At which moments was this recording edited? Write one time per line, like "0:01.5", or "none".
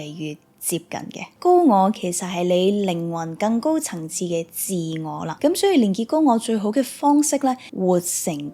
0:01.3
0:05.3
0:07.7